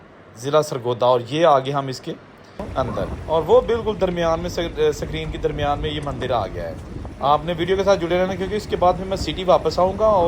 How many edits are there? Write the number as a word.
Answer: one